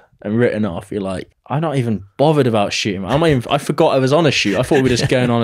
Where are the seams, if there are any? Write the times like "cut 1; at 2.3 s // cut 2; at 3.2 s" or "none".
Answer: cut 1; at 1.3 s